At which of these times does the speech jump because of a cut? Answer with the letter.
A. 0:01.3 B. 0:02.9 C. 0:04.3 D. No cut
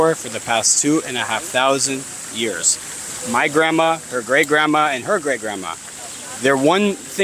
D